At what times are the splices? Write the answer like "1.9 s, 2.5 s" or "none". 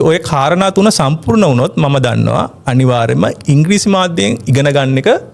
none